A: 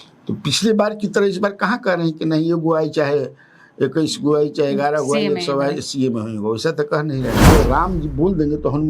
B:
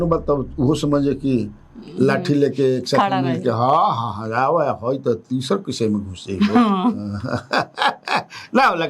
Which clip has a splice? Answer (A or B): A